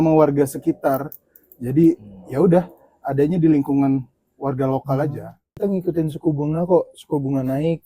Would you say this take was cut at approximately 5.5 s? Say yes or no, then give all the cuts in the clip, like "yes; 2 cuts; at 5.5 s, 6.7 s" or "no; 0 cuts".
yes; 1 cut; at 5.5 s